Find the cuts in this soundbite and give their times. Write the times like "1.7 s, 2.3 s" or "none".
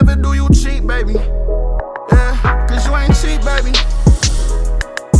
none

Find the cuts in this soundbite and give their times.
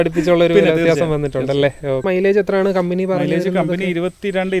2.0 s

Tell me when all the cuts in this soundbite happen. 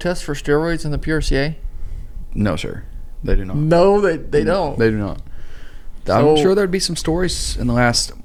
none

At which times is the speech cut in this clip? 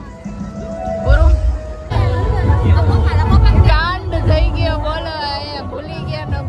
1.9 s

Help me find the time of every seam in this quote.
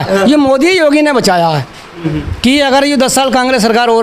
2.1 s

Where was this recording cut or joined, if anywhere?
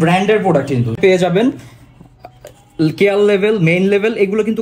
0.9 s

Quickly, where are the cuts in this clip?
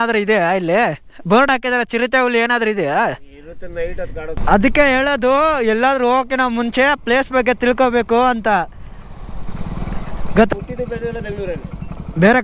4.4 s, 10.5 s

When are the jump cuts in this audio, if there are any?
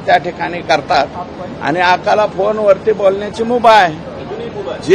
none

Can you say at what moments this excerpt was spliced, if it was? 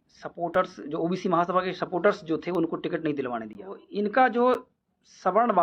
3.8 s

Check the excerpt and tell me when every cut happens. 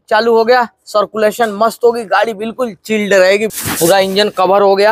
3.5 s

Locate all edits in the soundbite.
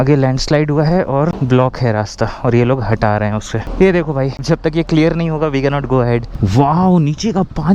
3.6 s, 4.4 s, 6.3 s

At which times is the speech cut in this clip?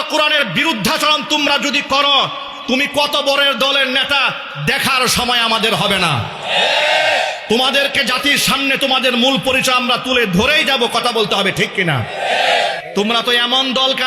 12.8 s

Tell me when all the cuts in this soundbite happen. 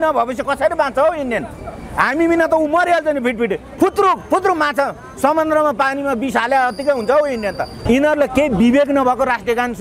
3.6 s, 7.8 s

